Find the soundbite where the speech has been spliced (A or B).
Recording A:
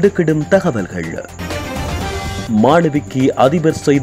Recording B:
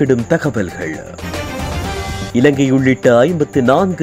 A